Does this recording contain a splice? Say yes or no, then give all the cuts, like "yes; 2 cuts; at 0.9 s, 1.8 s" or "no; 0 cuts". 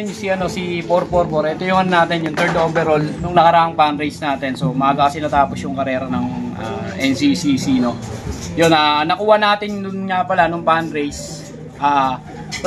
yes; 1 cut; at 3.3 s